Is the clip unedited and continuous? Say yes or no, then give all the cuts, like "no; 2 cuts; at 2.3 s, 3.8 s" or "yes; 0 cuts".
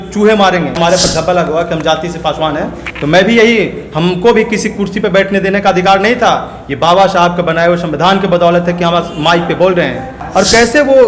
no; 2 cuts; at 0.8 s, 10.1 s